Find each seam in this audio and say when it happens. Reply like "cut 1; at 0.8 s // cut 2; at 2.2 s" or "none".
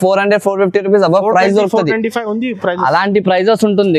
none